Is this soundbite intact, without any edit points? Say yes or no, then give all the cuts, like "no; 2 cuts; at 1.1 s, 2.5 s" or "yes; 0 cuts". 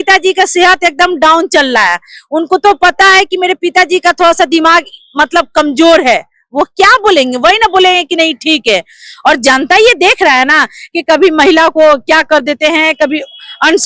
yes; 0 cuts